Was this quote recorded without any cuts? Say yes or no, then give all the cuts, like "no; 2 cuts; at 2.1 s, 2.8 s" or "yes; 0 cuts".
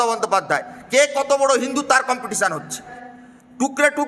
no; 1 cut; at 2.9 s